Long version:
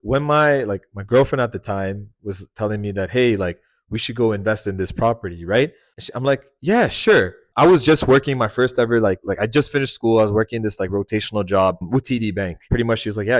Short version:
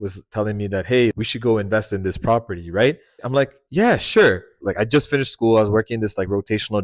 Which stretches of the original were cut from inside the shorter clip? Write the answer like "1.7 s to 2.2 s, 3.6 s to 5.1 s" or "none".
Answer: 3.4 s to 3.9 s, 5.9 s to 6.0 s, 7.5 s to 9.2 s